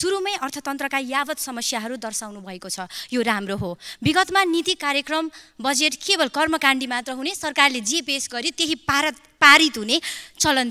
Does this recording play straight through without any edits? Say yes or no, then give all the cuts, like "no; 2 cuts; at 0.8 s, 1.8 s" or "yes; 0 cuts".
yes; 0 cuts